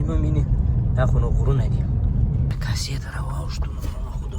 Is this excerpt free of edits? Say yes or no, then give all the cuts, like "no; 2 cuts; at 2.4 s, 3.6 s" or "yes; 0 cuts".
no; 1 cut; at 2.5 s